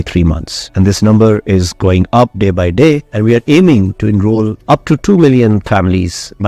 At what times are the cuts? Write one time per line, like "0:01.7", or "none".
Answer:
none